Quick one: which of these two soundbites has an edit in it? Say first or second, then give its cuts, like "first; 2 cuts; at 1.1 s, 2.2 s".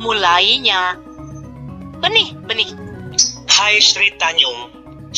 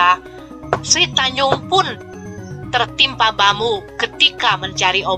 first; 1 cut; at 2.8 s